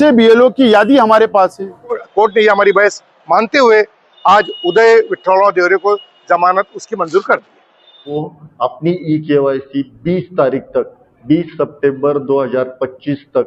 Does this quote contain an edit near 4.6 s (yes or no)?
no